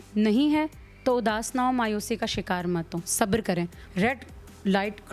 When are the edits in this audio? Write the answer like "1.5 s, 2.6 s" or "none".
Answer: 3.8 s